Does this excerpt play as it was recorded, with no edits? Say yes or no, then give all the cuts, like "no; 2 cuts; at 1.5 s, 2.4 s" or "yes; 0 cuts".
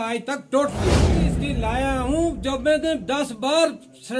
no; 1 cut; at 1.2 s